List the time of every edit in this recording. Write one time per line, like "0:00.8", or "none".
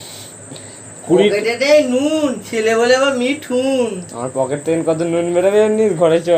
none